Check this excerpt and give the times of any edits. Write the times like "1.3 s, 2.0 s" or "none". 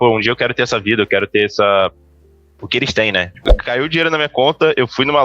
3.5 s